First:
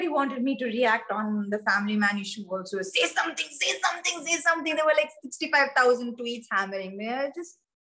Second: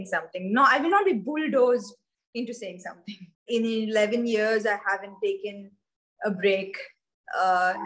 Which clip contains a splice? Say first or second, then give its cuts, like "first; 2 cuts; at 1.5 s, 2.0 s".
second; 1 cut; at 3.4 s